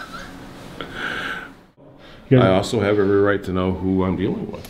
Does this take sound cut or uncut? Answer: cut